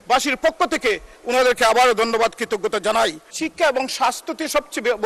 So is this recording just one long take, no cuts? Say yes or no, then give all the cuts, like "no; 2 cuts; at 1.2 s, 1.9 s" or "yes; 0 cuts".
no; 1 cut; at 3.3 s